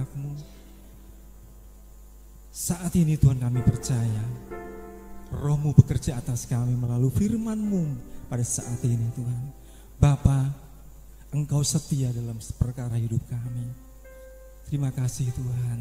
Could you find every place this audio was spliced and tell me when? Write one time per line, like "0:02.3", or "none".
none